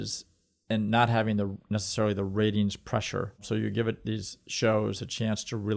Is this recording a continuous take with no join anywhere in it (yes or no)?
no